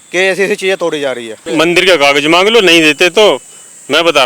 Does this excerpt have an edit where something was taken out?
yes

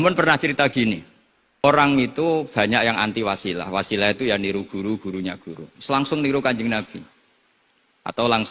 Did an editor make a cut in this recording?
yes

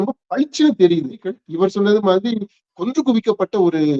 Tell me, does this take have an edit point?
yes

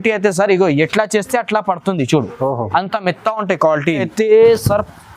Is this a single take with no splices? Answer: no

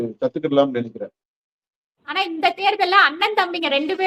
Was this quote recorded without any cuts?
no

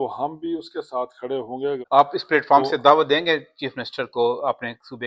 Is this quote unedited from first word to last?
no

